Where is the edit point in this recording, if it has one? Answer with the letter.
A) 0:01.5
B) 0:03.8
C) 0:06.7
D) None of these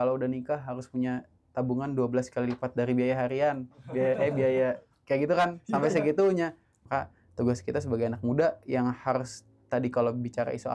C